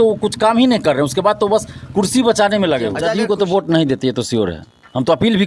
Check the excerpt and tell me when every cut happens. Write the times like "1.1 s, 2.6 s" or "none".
3.0 s

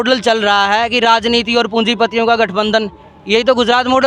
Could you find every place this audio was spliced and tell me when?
none

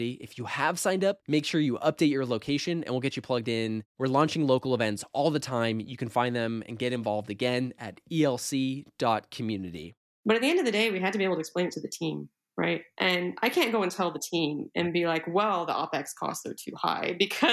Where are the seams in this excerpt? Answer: 10.0 s

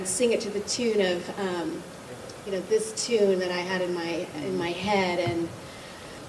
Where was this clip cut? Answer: none

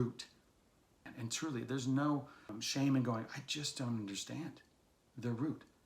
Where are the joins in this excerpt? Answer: 1.0 s, 2.5 s

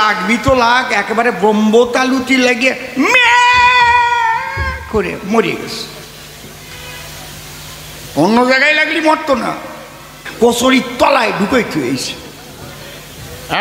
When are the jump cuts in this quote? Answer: 10.2 s

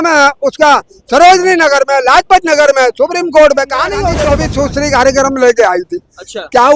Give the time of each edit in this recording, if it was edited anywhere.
4.2 s

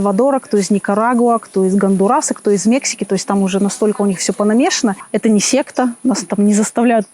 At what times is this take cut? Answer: 5.1 s

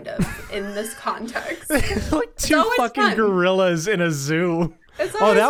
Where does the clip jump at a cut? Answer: none

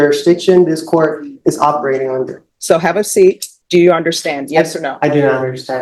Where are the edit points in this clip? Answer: 2.4 s, 3.5 s

